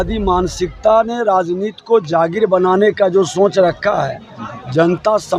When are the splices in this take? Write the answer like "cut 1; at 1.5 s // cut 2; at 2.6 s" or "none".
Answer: none